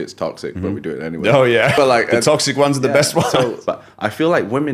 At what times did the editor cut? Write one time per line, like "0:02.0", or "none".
0:01.7
0:03.6